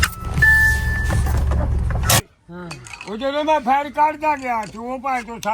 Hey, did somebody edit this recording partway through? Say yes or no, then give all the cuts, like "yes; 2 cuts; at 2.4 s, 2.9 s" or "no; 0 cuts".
yes; 2 cuts; at 2.2 s, 3.7 s